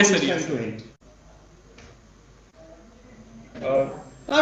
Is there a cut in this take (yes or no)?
no